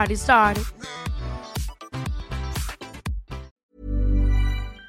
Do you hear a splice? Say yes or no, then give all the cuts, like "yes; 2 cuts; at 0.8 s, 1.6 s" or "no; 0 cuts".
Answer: yes; 1 cut; at 3.6 s